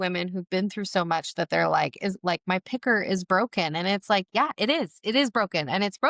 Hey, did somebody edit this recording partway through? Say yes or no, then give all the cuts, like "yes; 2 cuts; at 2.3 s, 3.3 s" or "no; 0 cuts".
no; 0 cuts